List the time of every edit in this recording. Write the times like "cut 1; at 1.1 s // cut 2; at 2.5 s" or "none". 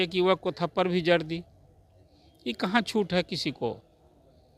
none

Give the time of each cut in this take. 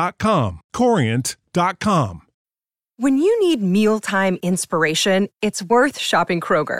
cut 1; at 2.3 s

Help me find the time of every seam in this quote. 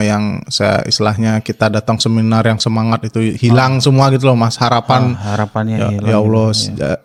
none

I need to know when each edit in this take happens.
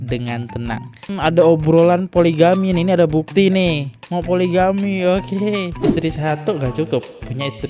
cut 1; at 1.1 s

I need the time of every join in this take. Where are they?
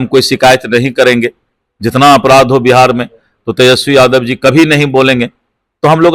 none

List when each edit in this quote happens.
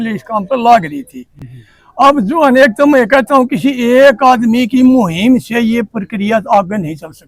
none

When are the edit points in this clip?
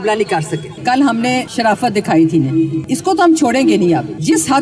cut 1; at 0.8 s // cut 2; at 2.8 s

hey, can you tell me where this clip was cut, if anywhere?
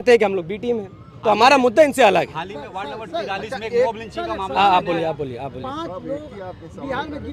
none

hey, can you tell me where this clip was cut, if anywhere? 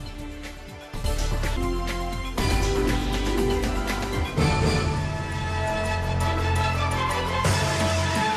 cut 1; at 1.0 s

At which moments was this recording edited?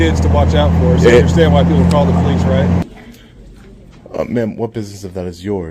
cut 1; at 2.8 s

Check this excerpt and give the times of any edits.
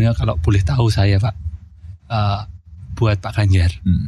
none

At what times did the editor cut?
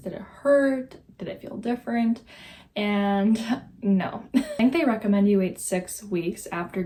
none

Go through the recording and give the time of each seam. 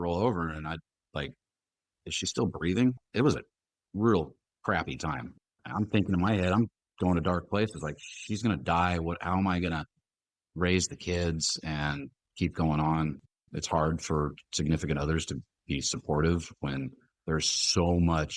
cut 1; at 3.0 s // cut 2; at 5.3 s // cut 3; at 13.3 s

